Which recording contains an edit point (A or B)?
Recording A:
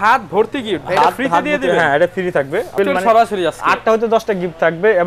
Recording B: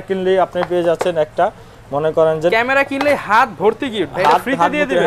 A